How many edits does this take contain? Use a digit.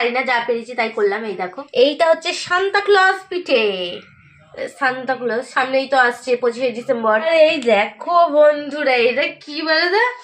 2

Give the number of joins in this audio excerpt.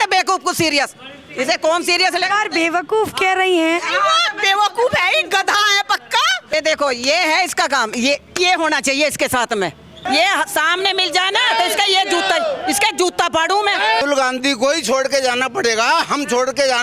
3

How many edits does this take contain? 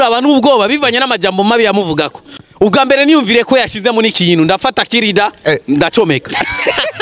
1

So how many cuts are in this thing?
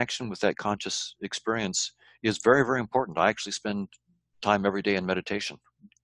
0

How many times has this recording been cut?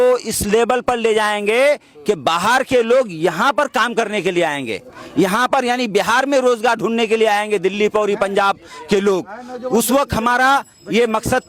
0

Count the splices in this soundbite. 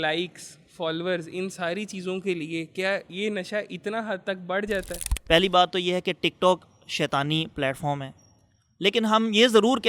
2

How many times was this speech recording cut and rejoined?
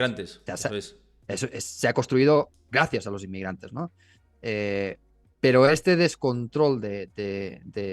0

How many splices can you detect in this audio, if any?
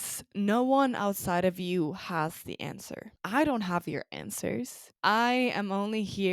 2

